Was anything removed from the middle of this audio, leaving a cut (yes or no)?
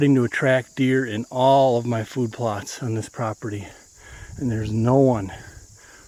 no